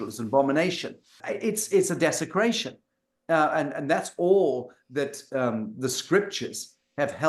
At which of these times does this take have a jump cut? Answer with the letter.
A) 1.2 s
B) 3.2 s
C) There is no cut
A